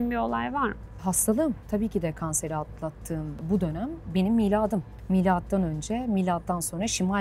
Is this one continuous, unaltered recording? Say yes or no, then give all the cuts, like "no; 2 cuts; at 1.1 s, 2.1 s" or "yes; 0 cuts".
no; 4 cuts; at 0.9 s, 1.6 s, 3.4 s, 4.9 s